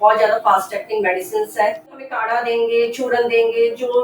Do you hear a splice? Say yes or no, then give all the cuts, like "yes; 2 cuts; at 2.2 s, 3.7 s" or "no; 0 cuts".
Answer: yes; 1 cut; at 2.1 s